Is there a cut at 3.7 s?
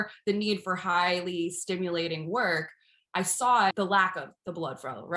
yes; 1 cut; at 3.7 s

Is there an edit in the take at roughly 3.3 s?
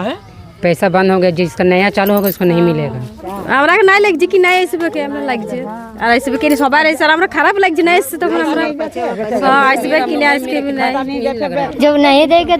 yes; 2 cuts; at 3.3 s, 11.7 s

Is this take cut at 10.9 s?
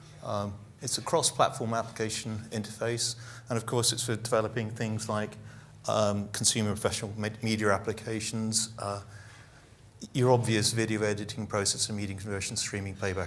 yes; 1 cut; at 10.9 s

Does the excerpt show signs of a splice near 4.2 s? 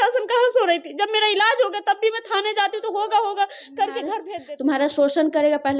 yes; 1 cut; at 4.2 s

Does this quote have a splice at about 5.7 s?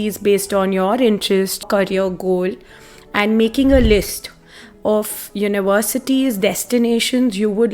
no; 1 cut; at 1.6 s

